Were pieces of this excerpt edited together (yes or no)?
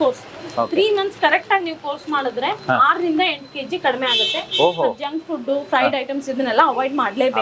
no